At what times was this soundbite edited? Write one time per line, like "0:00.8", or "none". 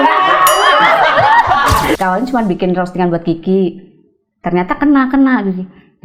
0:02.0